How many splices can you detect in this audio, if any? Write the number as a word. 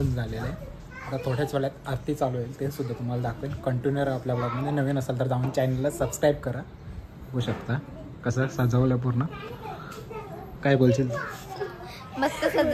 zero